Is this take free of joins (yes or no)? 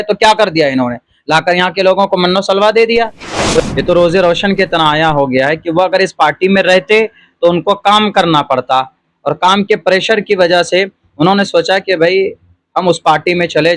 no